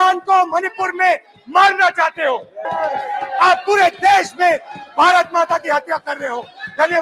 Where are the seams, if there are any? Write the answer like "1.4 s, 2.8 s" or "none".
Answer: 2.6 s